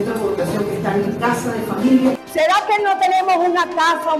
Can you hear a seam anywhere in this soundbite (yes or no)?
yes